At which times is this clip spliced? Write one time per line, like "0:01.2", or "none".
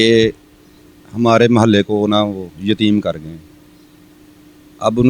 none